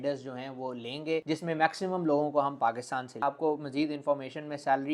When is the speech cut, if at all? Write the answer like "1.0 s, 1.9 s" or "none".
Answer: 3.2 s